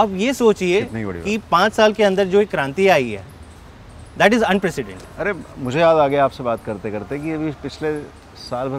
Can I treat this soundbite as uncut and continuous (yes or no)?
yes